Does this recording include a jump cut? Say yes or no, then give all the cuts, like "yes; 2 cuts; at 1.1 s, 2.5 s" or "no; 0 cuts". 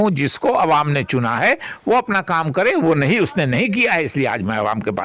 no; 0 cuts